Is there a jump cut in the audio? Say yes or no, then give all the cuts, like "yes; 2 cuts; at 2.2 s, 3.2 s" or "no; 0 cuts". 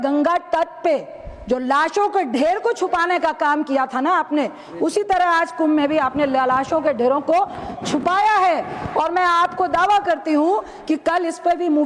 no; 0 cuts